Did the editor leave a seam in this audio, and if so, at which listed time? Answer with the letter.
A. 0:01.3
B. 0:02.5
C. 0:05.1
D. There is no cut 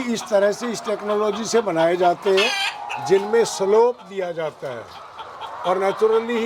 D